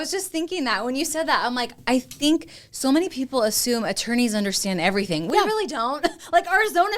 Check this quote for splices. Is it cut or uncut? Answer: uncut